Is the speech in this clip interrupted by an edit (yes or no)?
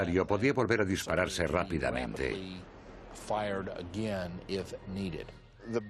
no